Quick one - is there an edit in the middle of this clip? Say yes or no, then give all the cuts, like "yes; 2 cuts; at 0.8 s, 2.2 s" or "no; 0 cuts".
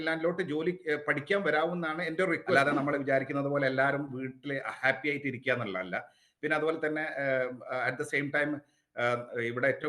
yes; 1 cut; at 2.6 s